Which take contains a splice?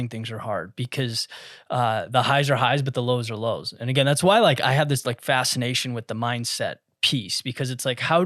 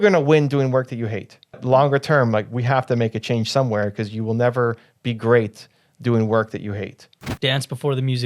second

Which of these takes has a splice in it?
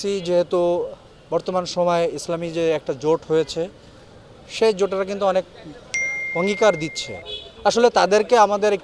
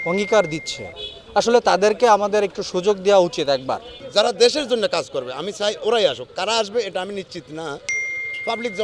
second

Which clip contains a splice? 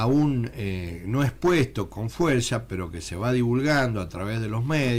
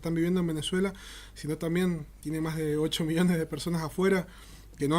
second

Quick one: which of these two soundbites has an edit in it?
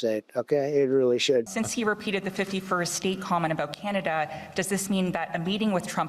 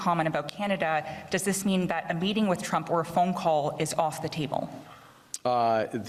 first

